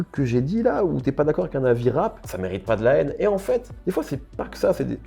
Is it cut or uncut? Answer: uncut